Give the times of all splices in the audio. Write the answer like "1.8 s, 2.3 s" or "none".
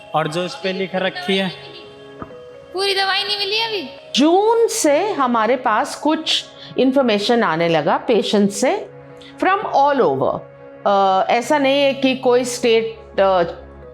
4.0 s